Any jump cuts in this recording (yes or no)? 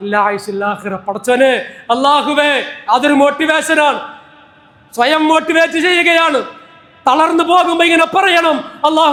no